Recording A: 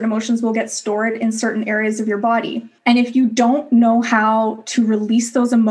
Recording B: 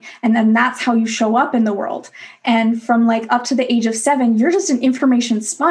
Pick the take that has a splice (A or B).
A